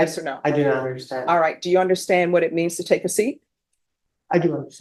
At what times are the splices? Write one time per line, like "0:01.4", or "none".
none